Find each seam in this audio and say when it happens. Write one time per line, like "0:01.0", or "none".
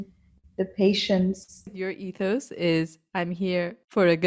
0:01.8